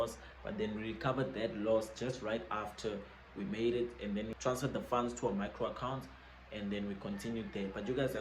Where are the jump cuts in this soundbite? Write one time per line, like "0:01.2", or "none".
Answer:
0:04.3